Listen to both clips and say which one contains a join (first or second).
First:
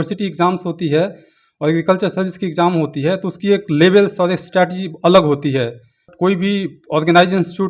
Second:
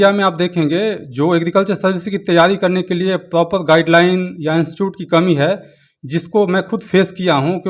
first